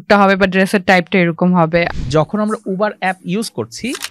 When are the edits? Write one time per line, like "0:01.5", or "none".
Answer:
0:01.9